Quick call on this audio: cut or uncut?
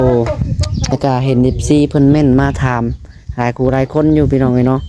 cut